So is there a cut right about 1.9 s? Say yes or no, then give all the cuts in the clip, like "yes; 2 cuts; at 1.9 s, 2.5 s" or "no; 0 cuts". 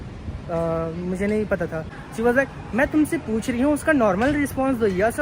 yes; 1 cut; at 1.9 s